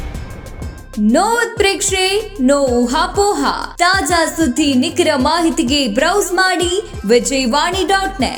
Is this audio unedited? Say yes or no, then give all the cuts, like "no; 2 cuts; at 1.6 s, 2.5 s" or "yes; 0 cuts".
yes; 0 cuts